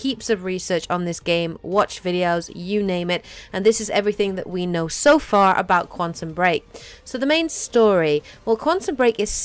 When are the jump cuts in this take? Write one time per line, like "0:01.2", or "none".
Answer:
none